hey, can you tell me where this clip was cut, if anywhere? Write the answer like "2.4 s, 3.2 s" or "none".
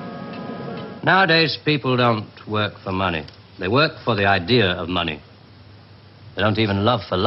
0.9 s